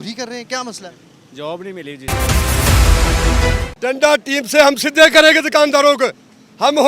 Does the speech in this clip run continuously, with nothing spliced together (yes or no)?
no